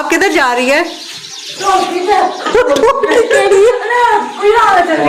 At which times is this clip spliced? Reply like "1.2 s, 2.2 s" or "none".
none

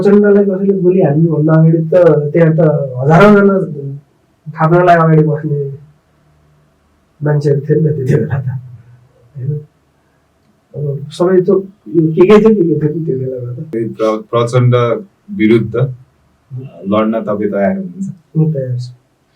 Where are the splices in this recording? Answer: 13.7 s

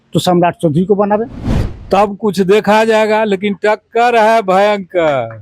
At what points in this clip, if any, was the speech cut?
1.4 s

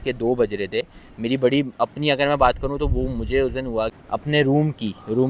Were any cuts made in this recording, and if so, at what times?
3.9 s

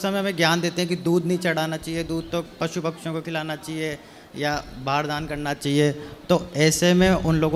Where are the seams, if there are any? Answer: none

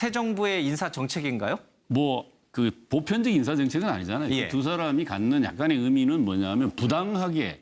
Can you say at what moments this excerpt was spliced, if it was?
5.3 s

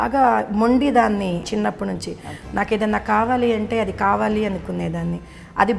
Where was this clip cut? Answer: 1.5 s

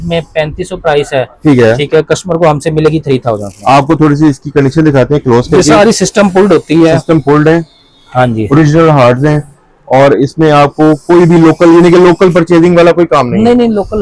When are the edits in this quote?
none

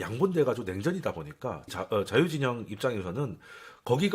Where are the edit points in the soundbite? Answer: 1.7 s

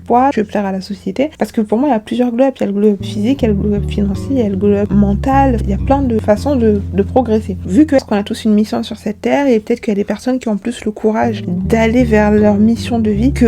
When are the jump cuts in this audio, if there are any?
8.0 s

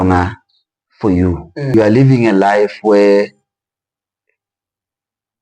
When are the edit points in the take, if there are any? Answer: 1.7 s

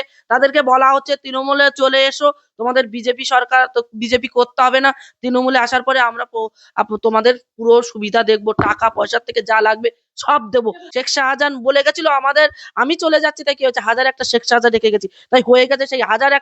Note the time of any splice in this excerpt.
10.8 s

